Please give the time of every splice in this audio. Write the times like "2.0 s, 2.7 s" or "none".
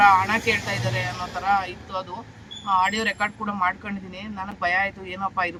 none